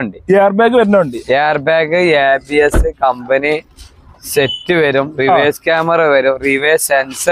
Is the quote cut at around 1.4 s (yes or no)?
no